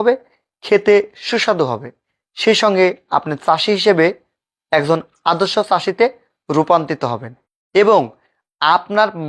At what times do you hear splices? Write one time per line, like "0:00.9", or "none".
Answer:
none

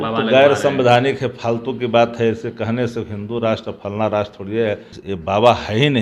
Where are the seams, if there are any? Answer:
0:04.9

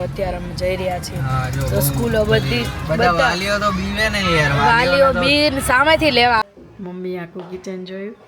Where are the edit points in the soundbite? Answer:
0:06.4

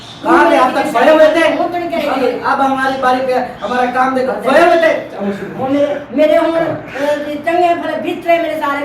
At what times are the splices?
none

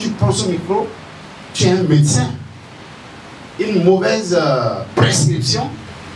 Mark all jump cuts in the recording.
none

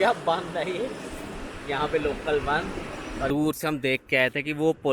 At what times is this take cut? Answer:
0:03.3

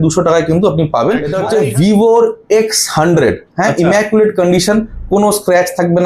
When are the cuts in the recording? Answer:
0:01.4

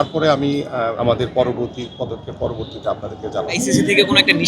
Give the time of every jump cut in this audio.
0:01.0
0:03.6

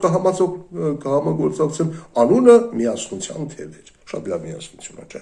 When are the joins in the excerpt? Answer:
none

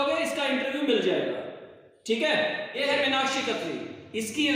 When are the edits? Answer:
0:02.7

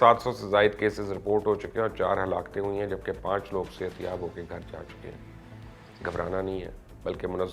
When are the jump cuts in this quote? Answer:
none

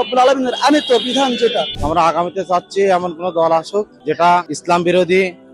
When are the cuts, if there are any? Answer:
0:01.7
0:03.9
0:04.5

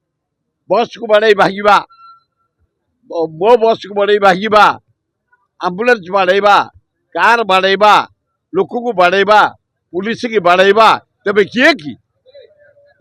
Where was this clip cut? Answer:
none

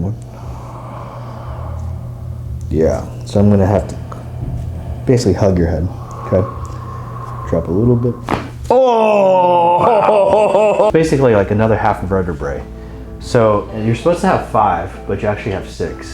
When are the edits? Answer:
0:10.9

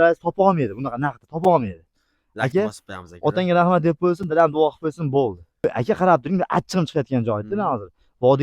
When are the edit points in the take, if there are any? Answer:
0:05.6

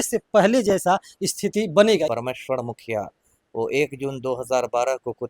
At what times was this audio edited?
0:02.1

